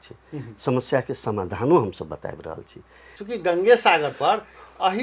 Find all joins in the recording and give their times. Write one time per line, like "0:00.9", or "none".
0:03.1